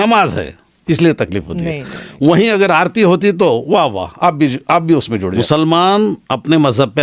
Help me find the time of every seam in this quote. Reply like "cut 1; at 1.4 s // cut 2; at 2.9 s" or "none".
cut 1; at 5.3 s